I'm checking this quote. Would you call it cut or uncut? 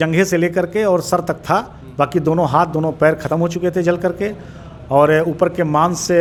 uncut